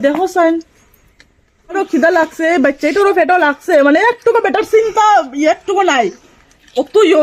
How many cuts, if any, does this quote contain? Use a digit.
1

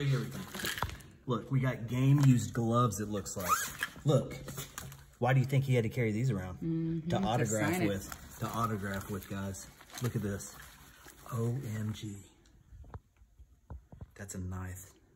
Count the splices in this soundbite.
0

